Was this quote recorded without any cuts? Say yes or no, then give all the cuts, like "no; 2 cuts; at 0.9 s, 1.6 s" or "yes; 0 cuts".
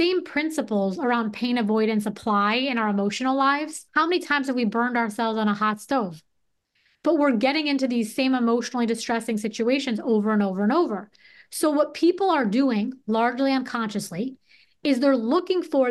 no; 1 cut; at 3.8 s